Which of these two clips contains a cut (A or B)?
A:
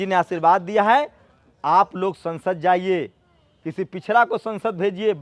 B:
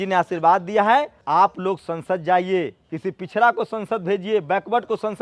B